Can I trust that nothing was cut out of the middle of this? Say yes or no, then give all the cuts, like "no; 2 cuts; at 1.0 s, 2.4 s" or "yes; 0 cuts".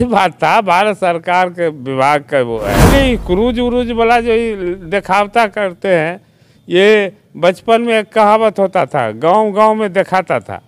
no; 1 cut; at 2.9 s